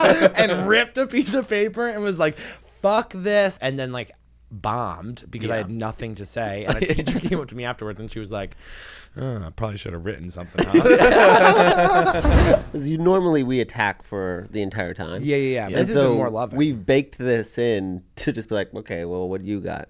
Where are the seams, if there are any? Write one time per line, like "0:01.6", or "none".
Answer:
0:03.6
0:12.6